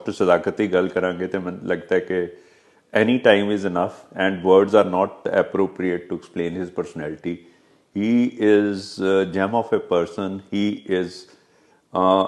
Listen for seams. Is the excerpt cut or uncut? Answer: uncut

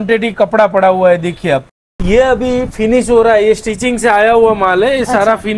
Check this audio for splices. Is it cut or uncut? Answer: cut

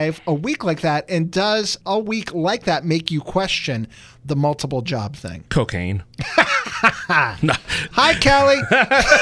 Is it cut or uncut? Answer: uncut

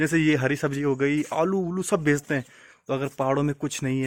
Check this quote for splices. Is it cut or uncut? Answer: uncut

